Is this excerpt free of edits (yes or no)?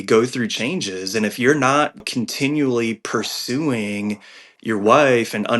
no